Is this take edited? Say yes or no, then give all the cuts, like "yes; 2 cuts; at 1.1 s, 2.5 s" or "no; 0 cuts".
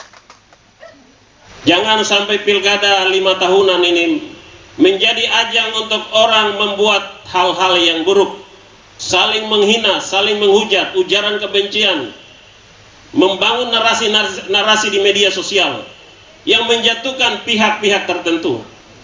yes; 1 cut; at 1.5 s